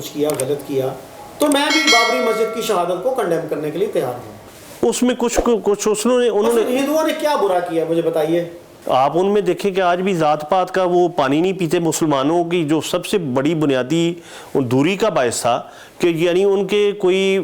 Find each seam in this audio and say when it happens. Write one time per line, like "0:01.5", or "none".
0:04.3
0:08.7